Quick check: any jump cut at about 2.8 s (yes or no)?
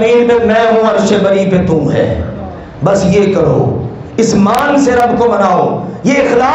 no